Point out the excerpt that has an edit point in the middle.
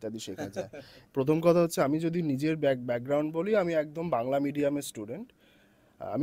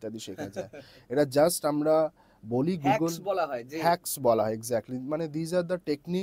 first; 1 cut; at 0.9 s

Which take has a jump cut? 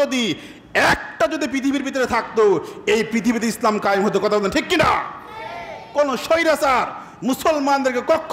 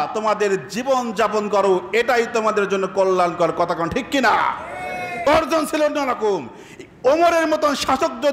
second; 1 cut; at 5.2 s

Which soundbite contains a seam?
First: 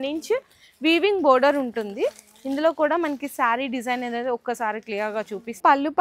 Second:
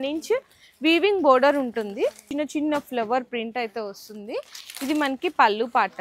second; 1 cut; at 2.2 s

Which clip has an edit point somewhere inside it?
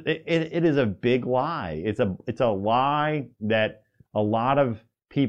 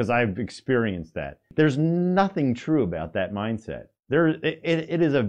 second; 1 cut; at 1.4 s

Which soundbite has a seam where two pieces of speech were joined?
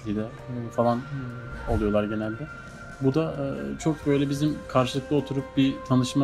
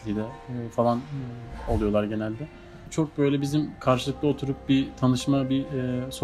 second; 1 cut; at 2.8 s

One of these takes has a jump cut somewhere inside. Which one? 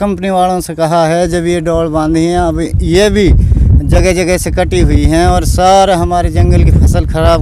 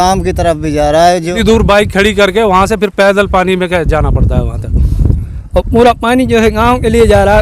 second; 2 cuts; at 1.4 s, 5.2 s

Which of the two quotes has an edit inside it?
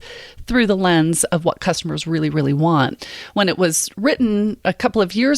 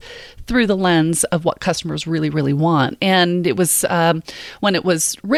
first; 1 cut; at 3.0 s

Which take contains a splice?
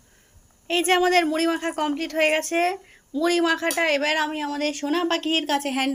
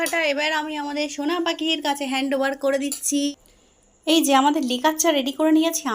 second; 1 cut; at 3.3 s

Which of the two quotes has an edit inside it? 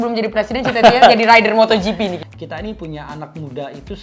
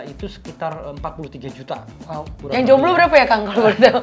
first; 1 cut; at 2.2 s

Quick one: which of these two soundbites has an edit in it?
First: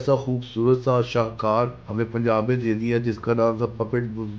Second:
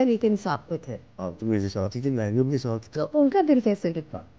first; 1 cut; at 1.8 s

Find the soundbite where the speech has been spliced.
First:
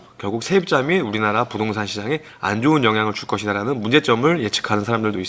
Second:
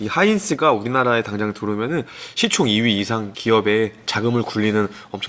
second; 1 cut; at 3.3 s

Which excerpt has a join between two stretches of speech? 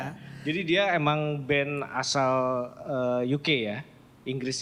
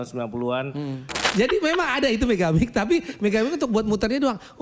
second; 1 cut; at 1.2 s

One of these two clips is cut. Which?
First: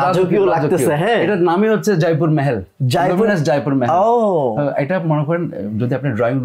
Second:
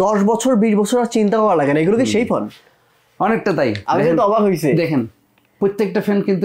second; 1 cut; at 3.8 s

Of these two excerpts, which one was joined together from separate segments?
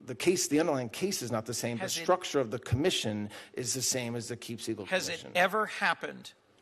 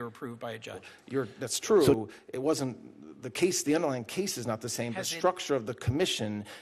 second; 1 cut; at 0.9 s

